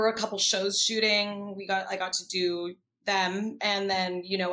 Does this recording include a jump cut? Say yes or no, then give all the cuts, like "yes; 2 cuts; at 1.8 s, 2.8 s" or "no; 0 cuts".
no; 0 cuts